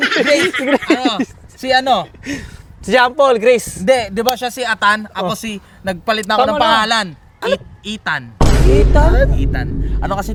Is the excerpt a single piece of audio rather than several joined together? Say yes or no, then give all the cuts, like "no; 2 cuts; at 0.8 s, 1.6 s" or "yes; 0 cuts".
yes; 0 cuts